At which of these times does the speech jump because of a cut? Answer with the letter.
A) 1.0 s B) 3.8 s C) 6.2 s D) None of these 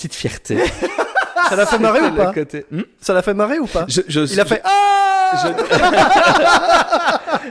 D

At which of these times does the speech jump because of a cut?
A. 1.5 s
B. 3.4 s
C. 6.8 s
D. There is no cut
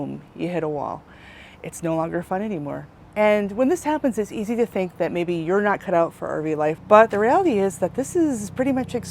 C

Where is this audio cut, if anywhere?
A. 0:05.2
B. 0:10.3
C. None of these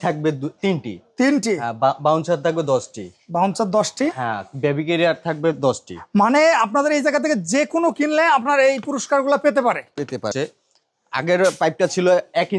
B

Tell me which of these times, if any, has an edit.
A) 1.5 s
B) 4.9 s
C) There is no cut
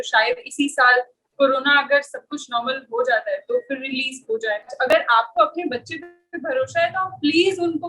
B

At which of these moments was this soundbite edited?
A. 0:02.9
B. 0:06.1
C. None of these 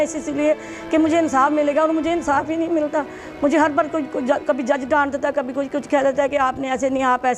C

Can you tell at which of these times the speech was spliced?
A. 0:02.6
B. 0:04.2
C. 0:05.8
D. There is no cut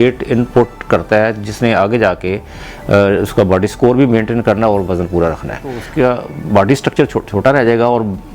C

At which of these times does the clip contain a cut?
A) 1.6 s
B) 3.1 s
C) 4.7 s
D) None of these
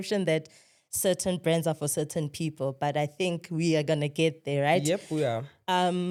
D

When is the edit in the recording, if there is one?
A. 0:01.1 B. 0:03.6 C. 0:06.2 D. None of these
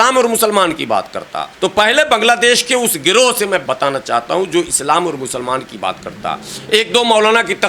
B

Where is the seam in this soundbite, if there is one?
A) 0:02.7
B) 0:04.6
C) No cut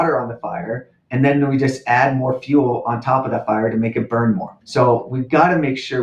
B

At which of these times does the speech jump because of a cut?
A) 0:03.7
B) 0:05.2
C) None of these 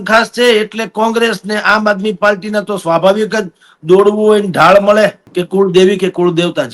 B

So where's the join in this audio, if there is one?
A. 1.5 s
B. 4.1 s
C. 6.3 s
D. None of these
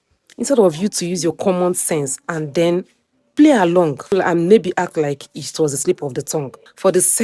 B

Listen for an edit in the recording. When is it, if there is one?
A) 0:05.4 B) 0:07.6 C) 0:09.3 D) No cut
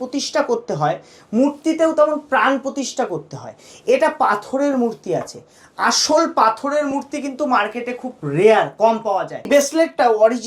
C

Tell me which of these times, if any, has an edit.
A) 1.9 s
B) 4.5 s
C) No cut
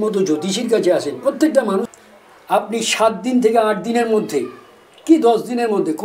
A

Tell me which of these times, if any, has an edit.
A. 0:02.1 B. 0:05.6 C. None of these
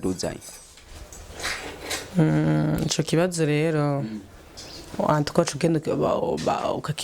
C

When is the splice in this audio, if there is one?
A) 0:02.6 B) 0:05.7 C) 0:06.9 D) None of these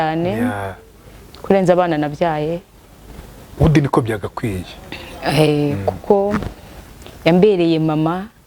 D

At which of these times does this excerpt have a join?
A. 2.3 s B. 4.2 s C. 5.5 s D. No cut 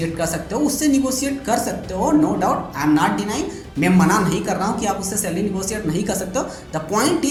D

